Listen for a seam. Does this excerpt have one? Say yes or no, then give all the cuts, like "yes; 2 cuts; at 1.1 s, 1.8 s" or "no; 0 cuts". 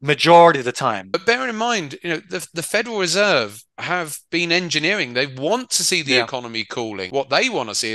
yes; 2 cuts; at 1.0 s, 7.0 s